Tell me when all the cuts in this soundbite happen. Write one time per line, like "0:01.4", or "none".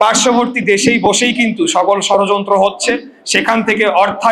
none